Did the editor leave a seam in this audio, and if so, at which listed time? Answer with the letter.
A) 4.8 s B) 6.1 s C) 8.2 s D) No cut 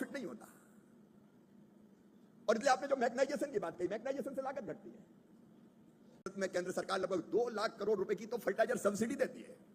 B